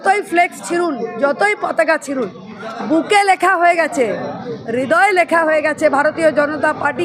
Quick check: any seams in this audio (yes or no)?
no